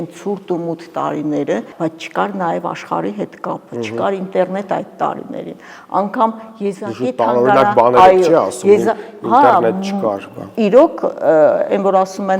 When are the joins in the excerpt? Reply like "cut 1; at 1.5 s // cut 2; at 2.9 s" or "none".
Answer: cut 1; at 1.7 s